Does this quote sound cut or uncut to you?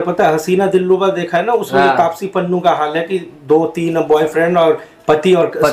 uncut